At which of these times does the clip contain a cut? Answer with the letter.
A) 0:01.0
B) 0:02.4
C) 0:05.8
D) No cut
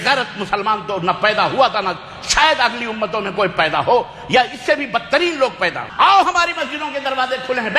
C